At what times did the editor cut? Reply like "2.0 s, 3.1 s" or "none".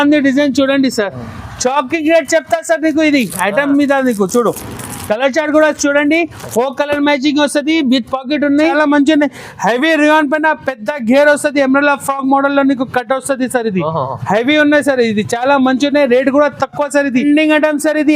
8.7 s, 17.2 s